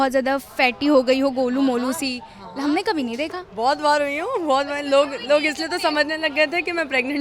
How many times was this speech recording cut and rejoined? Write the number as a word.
zero